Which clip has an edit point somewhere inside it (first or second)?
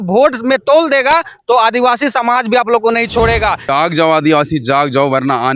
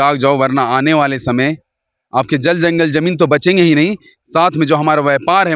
first